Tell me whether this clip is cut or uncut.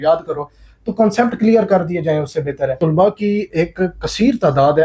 cut